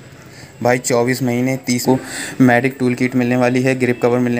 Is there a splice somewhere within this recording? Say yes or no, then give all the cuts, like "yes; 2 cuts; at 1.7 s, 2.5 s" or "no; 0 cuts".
yes; 1 cut; at 1.8 s